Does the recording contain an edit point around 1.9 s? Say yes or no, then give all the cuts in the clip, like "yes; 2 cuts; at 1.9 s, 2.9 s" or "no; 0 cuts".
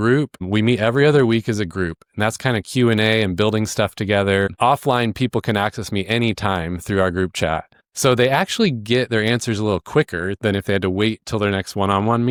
no; 0 cuts